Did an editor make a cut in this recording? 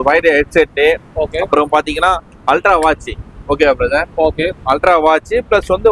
no; 0 cuts

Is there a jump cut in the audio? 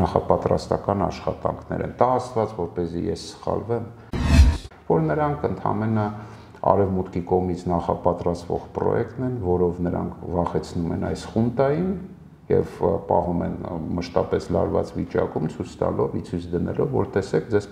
yes; 1 cut; at 4.5 s

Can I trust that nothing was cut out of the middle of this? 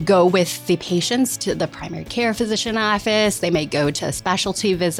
no; 1 cut; at 2.4 s

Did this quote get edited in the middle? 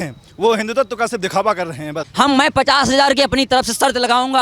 yes; 1 cut; at 2.0 s

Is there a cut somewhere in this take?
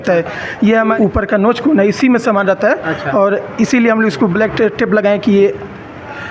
yes; 1 cut; at 1.0 s

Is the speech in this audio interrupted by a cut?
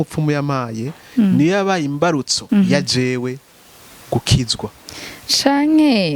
yes; 1 cut; at 2.3 s

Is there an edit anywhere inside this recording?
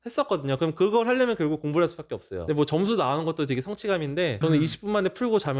no; 0 cuts

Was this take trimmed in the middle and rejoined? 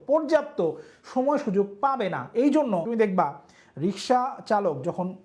yes; 1 cut; at 2.9 s

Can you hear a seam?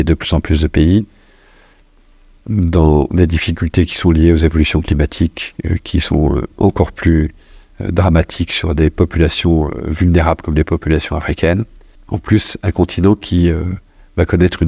no; 0 cuts

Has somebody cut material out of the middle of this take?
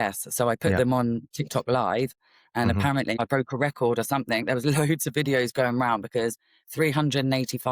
yes; 1 cut; at 3.2 s

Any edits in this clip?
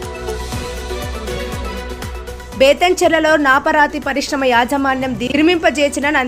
no; 0 cuts

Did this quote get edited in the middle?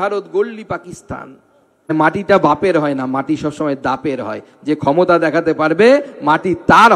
yes; 1 cut; at 1.9 s

